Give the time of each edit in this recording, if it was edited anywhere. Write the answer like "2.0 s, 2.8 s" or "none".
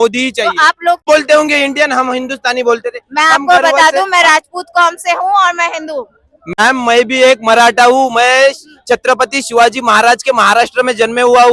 1.1 s